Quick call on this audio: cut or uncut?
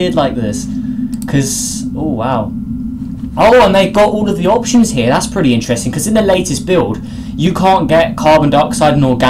cut